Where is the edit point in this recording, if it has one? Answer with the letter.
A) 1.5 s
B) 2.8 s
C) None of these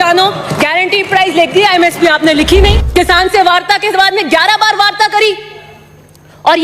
B